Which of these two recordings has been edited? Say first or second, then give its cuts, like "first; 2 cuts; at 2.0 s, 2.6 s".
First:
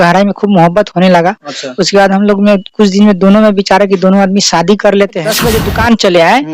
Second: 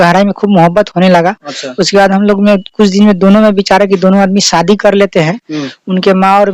first; 1 cut; at 5.3 s